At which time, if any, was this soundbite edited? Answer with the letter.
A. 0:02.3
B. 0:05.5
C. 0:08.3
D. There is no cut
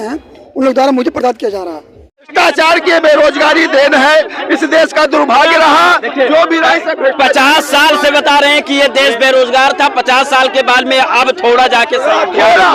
A